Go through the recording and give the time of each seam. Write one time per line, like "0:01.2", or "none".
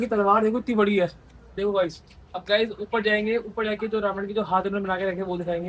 none